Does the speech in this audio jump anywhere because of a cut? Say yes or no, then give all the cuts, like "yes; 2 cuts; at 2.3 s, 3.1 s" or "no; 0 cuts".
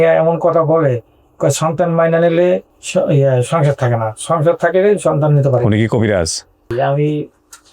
yes; 2 cuts; at 2.8 s, 6.7 s